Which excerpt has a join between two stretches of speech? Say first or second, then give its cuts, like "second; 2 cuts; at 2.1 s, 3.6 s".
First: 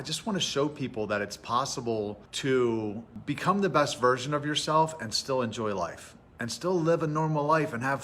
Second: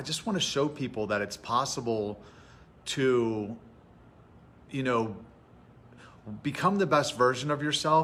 first; 2 cuts; at 2.3 s, 3.1 s